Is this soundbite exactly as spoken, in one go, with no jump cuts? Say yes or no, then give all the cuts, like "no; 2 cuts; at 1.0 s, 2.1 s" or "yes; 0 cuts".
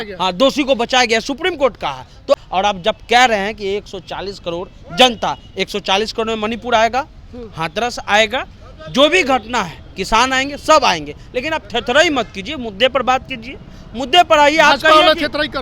no; 1 cut; at 2.4 s